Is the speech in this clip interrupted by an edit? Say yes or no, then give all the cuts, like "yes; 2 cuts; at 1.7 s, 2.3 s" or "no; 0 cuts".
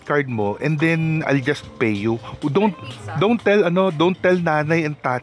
no; 0 cuts